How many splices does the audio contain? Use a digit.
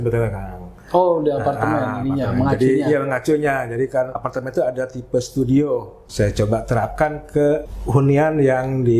3